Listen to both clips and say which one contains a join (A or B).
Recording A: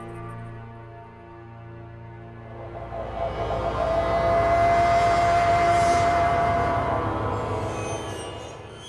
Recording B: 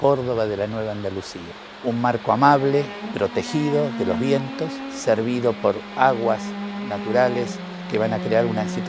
B